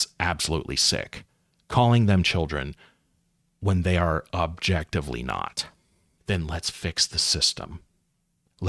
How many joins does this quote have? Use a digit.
1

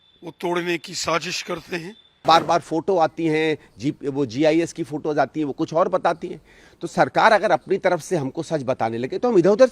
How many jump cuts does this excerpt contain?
1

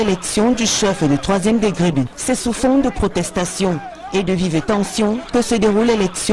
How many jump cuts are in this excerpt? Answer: 1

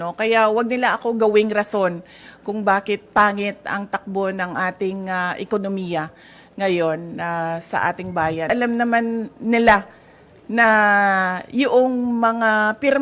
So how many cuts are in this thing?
1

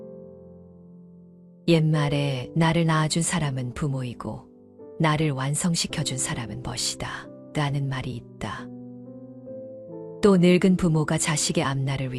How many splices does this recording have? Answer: 0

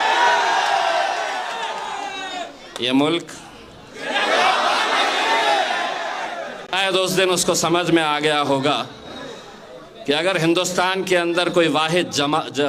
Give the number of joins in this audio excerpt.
1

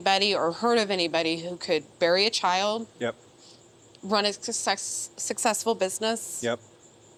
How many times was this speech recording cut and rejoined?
0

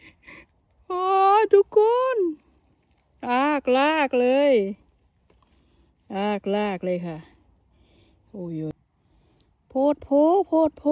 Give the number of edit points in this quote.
1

